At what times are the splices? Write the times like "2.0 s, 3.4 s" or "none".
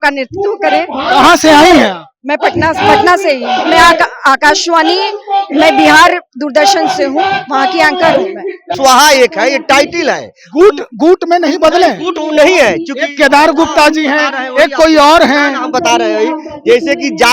8.7 s